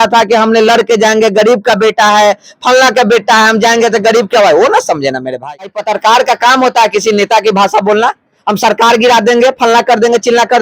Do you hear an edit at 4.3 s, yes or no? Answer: no